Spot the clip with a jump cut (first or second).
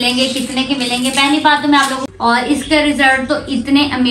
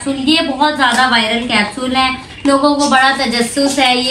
first